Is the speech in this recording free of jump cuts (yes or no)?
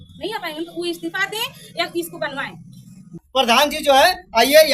no